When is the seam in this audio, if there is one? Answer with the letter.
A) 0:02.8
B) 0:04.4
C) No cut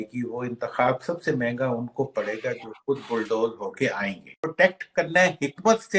B